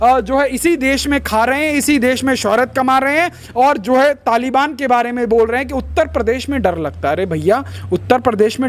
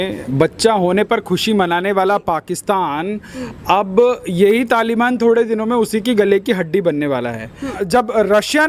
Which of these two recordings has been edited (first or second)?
second